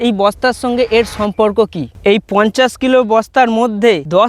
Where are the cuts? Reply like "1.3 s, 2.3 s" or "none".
1.8 s